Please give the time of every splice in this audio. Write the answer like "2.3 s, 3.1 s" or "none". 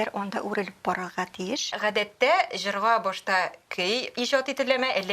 1.7 s